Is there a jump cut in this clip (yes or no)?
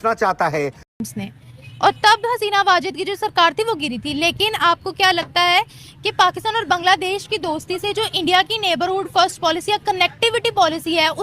yes